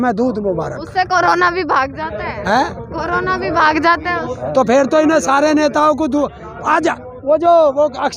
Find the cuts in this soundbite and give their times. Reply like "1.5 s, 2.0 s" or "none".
none